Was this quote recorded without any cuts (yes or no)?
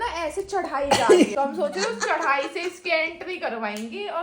no